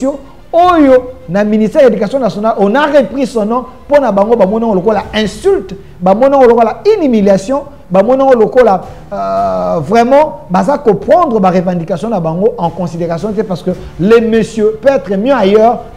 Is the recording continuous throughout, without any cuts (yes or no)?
yes